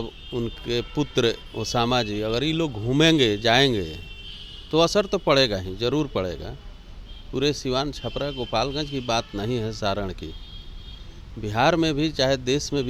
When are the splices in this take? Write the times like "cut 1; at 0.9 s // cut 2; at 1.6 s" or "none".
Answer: none